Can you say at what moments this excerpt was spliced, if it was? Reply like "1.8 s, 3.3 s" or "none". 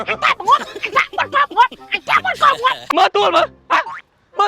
2.8 s